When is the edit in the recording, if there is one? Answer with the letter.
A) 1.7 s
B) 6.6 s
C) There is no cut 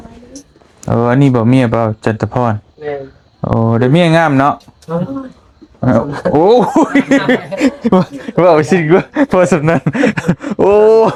C